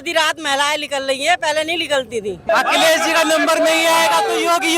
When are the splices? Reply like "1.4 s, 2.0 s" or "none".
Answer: 2.5 s